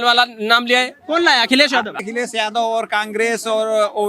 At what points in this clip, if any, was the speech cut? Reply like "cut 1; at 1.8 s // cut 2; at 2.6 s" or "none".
cut 1; at 1.9 s